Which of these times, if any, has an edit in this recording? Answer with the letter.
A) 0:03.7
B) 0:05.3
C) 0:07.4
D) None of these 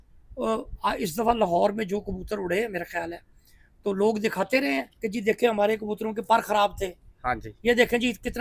D